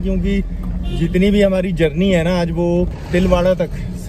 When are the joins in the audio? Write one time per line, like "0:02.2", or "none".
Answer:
none